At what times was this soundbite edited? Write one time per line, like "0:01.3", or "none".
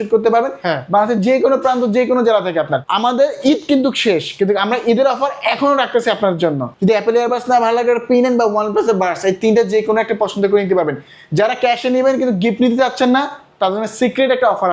0:02.8
0:06.7

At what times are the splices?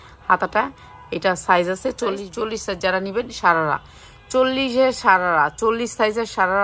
0:02.2

